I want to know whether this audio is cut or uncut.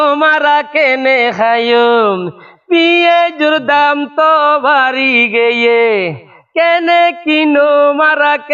uncut